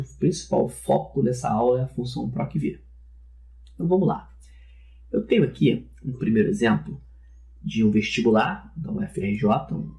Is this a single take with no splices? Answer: no; 1 cut; at 6.7 s

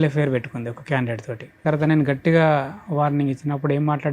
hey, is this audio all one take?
no; 1 cut; at 1.6 s

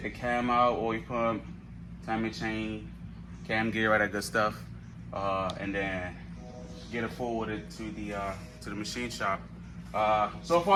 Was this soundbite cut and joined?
no; 0 cuts

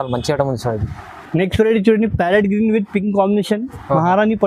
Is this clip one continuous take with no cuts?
yes; 0 cuts

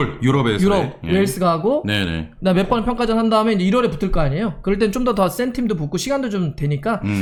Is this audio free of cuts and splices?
yes; 0 cuts

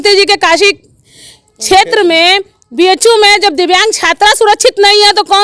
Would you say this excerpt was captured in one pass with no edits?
yes; 0 cuts

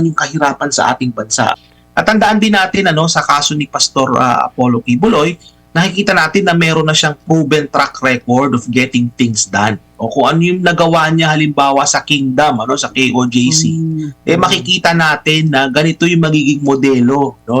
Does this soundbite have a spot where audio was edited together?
yes; 1 cut; at 1.6 s

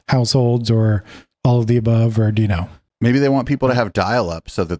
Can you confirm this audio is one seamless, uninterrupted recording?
no; 1 cut; at 2.8 s

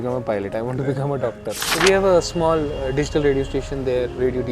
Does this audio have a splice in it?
yes; 1 cut; at 1.6 s

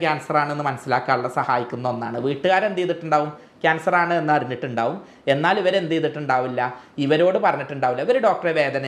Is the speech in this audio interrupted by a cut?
no; 0 cuts

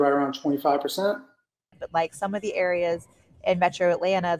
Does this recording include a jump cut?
yes; 1 cut; at 1.8 s

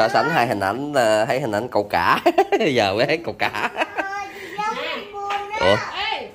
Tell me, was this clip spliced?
no; 0 cuts

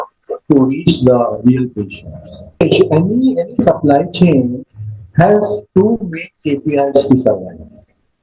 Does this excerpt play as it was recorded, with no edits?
no; 1 cut; at 2.6 s

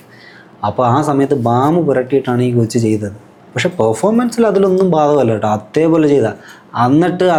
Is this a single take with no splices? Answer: yes; 0 cuts

